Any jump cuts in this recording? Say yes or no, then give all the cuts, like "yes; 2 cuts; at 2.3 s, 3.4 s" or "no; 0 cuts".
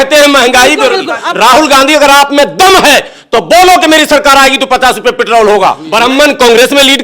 yes; 2 cuts; at 1.2 s, 5.8 s